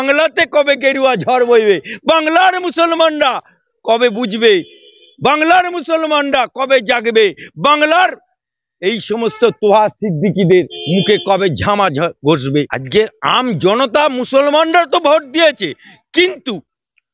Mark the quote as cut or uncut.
cut